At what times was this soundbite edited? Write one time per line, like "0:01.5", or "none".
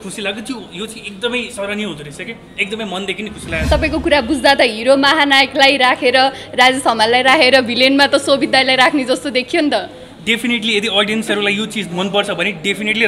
0:03.7